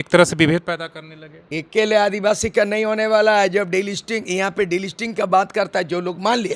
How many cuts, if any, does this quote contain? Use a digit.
0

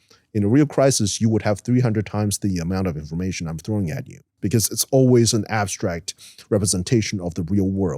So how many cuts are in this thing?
1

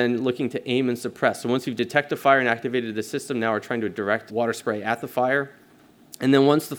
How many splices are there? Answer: 1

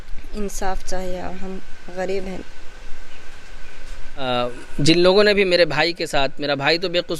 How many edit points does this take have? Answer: 1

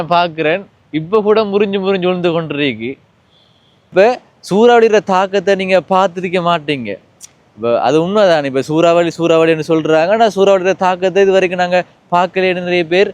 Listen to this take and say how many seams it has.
1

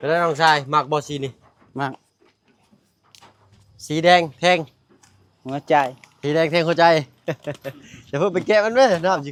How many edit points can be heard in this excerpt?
0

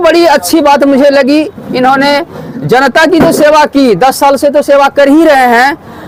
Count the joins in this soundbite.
0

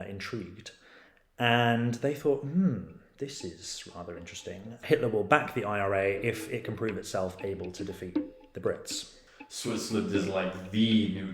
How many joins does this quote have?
2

